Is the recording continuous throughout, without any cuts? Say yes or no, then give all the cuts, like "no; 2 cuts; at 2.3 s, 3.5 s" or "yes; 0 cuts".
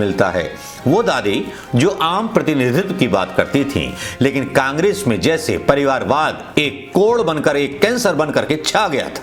yes; 0 cuts